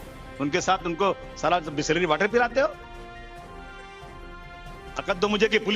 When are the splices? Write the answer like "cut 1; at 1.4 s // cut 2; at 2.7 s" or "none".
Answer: cut 1; at 3.3 s // cut 2; at 4.9 s